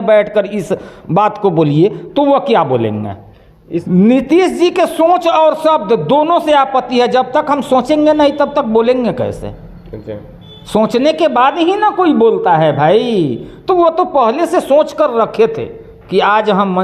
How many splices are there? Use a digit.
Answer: 1